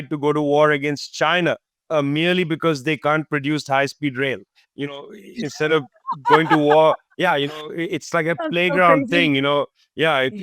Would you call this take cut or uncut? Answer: uncut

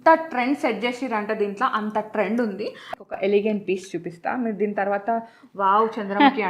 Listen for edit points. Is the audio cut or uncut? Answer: cut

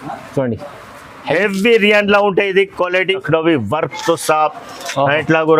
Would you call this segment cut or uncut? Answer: cut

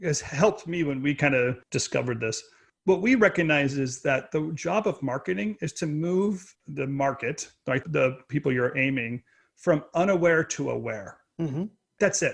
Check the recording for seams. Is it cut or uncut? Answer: cut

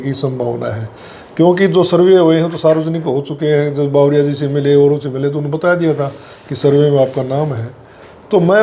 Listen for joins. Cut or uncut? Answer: uncut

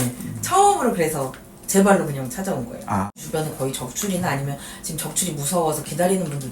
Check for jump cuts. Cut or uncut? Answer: cut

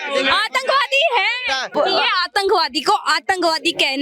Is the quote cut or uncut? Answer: cut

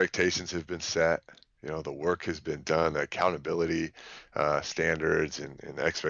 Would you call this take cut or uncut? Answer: uncut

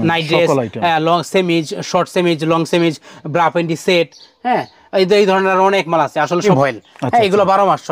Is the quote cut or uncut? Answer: cut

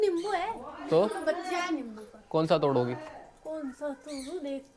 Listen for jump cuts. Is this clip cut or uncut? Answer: uncut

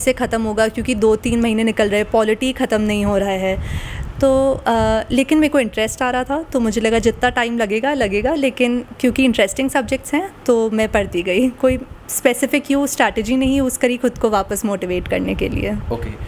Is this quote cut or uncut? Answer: uncut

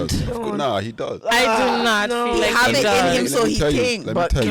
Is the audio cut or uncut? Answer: uncut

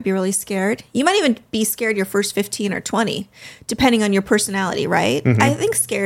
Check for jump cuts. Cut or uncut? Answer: uncut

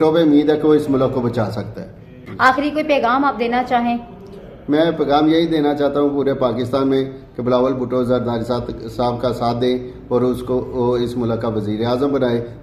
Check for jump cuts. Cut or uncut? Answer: uncut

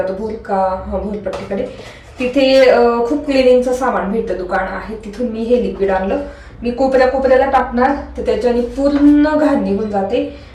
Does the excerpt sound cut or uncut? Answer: uncut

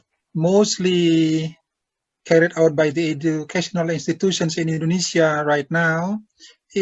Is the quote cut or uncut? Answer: uncut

